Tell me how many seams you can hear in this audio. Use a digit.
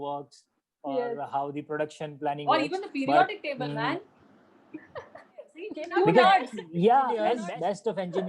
2